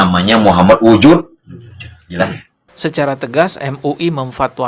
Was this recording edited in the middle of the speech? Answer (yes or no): yes